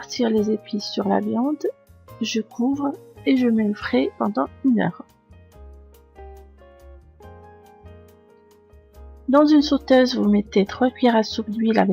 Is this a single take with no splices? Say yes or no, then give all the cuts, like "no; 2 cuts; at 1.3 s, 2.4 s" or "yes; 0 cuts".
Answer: no; 1 cut; at 1.6 s